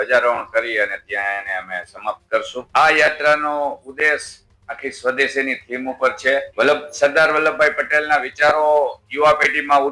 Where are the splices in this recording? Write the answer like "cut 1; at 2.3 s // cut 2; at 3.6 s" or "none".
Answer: cut 1; at 2.7 s // cut 2; at 6.5 s